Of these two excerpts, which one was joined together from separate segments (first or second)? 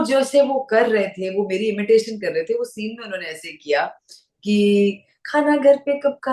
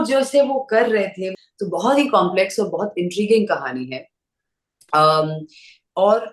second